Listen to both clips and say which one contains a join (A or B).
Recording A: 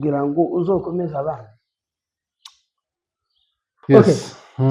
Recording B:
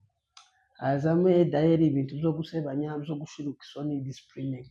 A